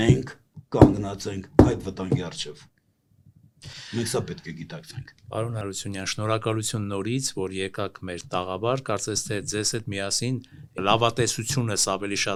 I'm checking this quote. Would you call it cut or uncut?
uncut